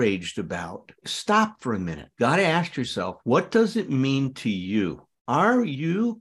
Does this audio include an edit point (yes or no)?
no